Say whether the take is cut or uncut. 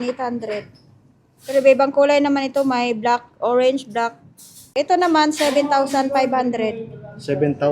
cut